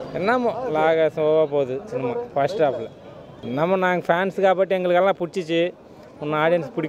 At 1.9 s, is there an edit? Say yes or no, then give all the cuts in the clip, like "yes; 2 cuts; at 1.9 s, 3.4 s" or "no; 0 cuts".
no; 1 cut; at 3.3 s